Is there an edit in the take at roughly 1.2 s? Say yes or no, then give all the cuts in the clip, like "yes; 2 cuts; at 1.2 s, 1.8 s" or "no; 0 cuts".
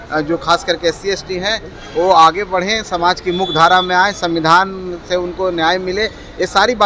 no; 0 cuts